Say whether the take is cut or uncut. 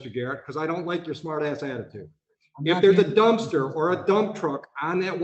uncut